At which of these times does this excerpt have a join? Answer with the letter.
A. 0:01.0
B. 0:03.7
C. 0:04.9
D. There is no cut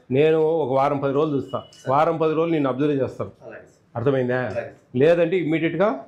D